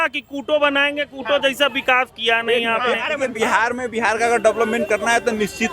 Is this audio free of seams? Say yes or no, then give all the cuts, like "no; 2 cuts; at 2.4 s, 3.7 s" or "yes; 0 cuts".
no; 1 cut; at 3.3 s